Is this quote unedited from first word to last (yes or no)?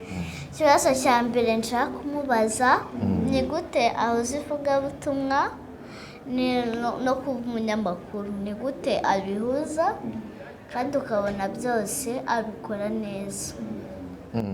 yes